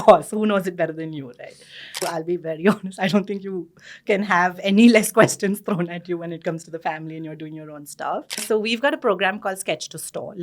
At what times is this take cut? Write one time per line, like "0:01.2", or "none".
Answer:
0:02.0
0:08.4